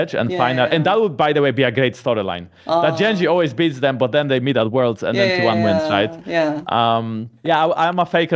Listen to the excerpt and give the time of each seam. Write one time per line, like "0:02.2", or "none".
0:07.3